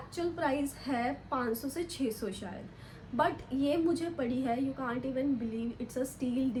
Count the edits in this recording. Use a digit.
0